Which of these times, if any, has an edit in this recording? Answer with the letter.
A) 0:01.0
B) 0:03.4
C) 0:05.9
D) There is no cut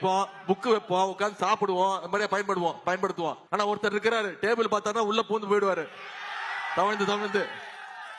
B